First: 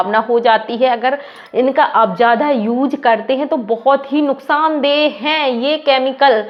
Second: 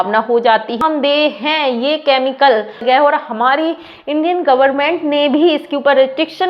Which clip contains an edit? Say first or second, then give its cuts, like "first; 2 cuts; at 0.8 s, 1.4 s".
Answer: second; 2 cuts; at 0.8 s, 2.8 s